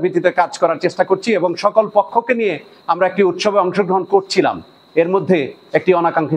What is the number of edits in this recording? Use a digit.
0